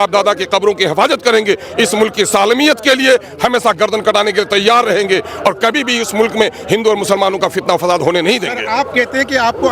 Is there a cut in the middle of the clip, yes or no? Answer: no